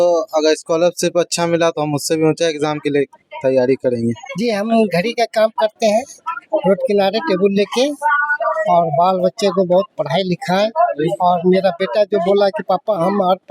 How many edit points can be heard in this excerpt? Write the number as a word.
one